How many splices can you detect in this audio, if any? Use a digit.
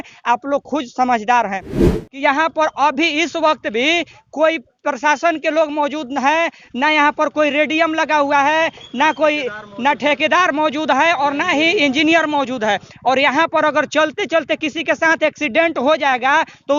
1